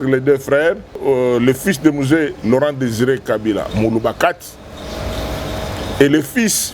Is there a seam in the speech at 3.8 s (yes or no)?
no